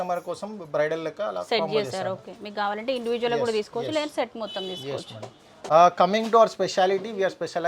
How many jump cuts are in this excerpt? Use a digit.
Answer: 0